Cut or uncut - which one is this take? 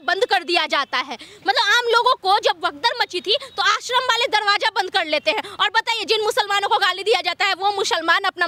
uncut